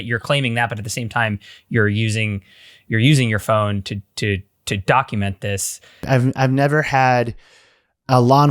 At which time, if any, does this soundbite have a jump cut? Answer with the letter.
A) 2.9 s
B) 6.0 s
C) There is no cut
B